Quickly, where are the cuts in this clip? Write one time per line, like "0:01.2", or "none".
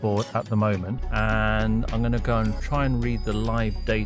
0:01.0